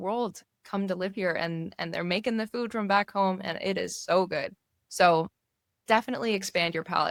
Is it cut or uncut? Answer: uncut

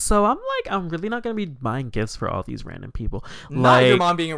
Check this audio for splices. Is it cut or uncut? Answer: uncut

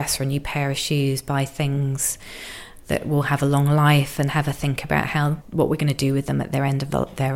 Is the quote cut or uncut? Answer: uncut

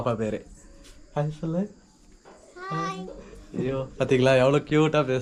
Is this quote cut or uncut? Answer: uncut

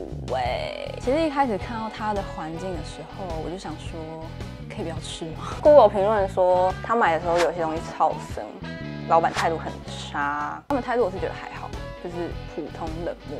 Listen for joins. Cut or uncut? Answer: cut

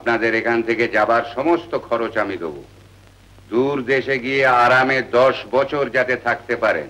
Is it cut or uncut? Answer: uncut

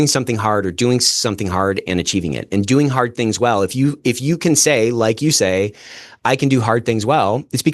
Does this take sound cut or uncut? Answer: uncut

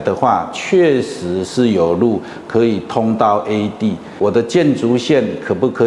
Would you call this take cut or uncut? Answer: cut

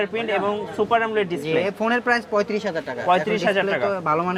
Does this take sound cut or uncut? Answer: uncut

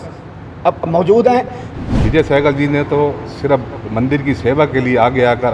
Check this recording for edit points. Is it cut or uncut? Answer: cut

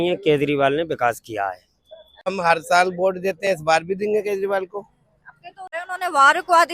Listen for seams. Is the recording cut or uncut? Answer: cut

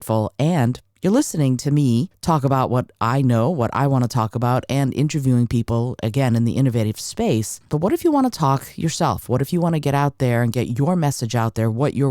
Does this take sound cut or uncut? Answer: cut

